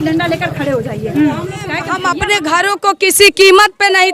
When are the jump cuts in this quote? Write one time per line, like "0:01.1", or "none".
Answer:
0:02.0